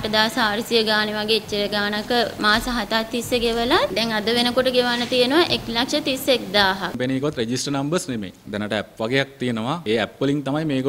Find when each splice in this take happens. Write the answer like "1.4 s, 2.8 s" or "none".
3.9 s, 6.9 s, 9.8 s